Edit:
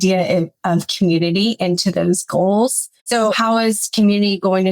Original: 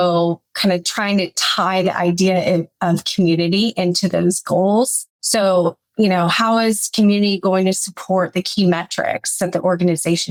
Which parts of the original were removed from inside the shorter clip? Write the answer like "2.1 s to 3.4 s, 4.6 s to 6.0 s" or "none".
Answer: 5.4 s to 6.2 s

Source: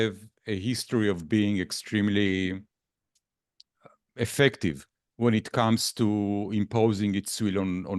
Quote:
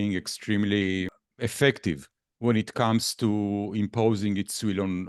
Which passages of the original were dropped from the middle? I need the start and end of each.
2.7 s to 4.0 s

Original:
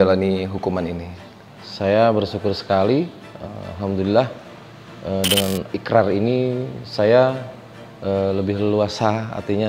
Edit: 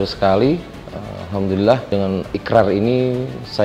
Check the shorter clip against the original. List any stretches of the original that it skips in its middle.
4.4 s to 5.3 s

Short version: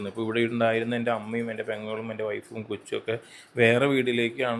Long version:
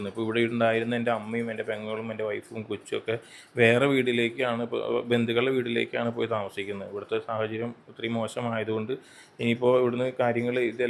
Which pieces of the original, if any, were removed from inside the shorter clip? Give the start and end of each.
none

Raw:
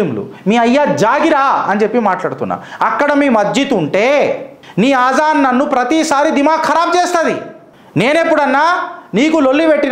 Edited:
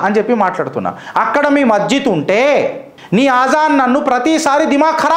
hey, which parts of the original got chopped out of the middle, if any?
none

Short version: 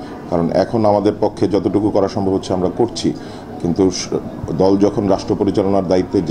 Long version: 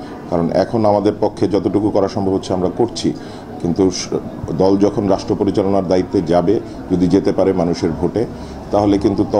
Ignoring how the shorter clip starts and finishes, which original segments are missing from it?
none

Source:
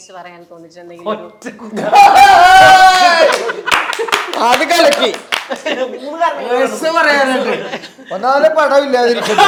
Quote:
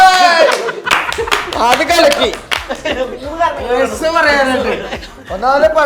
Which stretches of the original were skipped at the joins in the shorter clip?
none

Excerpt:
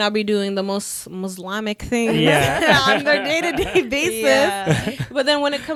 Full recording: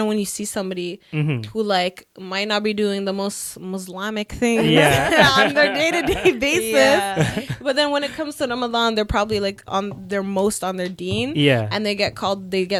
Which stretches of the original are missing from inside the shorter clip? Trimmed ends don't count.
none

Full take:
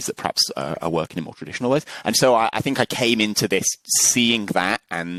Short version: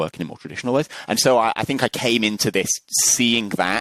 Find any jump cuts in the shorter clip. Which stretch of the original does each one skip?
none

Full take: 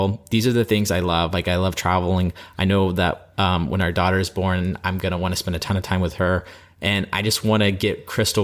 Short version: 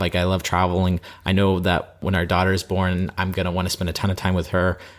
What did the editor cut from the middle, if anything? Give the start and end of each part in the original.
3.3 s to 3.7 s

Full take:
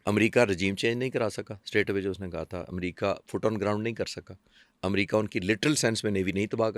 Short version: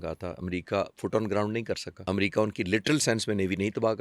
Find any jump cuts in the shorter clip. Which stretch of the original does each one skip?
4.2 s to 4.7 s

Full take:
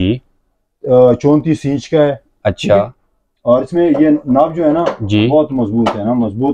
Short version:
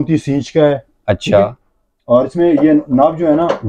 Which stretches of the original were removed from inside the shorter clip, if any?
none

